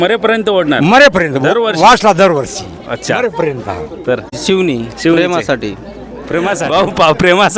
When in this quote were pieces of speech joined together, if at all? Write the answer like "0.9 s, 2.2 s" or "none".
4.4 s, 6.6 s